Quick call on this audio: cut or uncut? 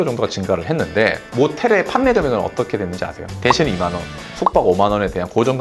uncut